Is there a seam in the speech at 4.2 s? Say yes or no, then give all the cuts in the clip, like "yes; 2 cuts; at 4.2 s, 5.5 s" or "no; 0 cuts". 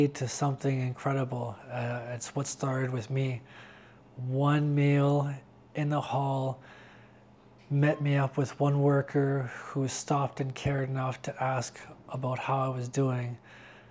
no; 0 cuts